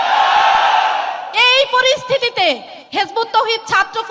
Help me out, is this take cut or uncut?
uncut